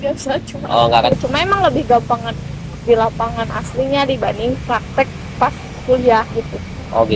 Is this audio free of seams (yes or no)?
no